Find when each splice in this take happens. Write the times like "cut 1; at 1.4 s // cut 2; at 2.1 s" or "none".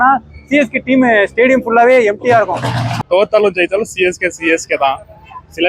cut 1; at 2.9 s